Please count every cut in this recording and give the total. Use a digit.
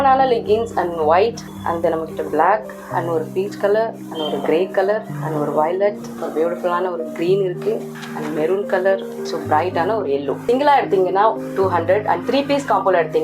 8